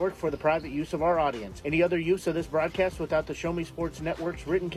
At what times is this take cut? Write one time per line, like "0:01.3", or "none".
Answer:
none